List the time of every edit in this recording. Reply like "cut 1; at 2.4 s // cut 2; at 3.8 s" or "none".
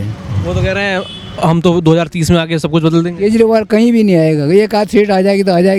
none

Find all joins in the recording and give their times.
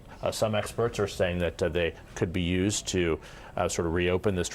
none

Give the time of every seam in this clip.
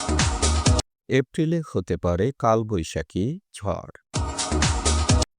cut 1; at 0.9 s

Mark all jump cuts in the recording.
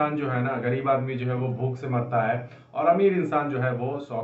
none

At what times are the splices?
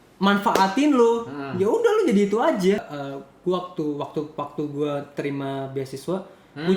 cut 1; at 2.8 s

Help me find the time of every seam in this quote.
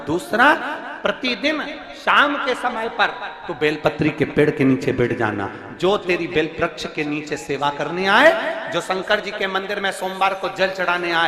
none

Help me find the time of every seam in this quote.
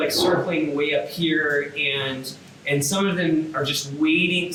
none

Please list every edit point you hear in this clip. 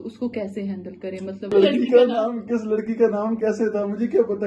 cut 1; at 1.5 s

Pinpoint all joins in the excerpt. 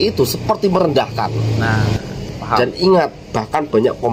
cut 1; at 2.3 s

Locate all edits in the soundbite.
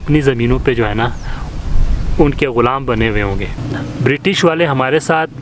cut 1; at 3.8 s

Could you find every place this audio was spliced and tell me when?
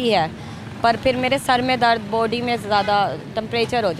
none

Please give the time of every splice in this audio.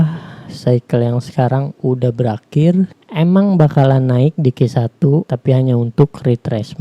cut 1; at 5.3 s

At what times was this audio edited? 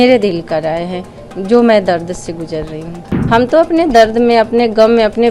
cut 1; at 3.1 s

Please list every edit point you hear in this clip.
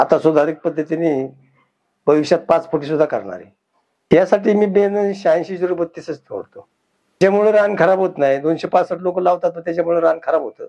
none

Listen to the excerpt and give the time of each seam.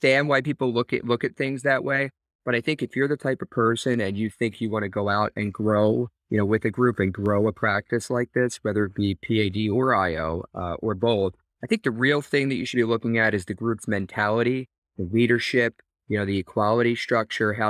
cut 1; at 11.5 s

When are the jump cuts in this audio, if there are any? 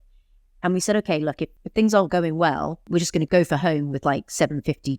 cut 1; at 1.5 s // cut 2; at 3.2 s

